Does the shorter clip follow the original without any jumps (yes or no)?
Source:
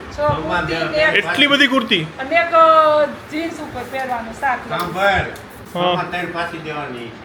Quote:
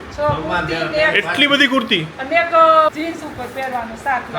no